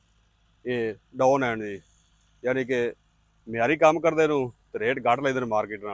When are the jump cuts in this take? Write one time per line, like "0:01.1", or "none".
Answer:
none